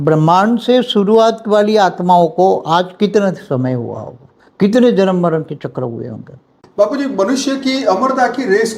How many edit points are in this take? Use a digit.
1